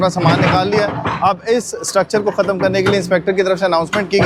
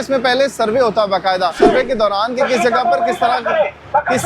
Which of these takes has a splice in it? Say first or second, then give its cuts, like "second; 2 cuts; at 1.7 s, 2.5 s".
second; 1 cut; at 1.6 s